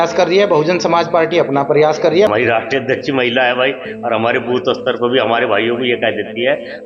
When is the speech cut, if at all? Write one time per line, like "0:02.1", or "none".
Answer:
0:02.3